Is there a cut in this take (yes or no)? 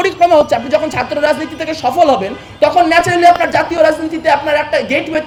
no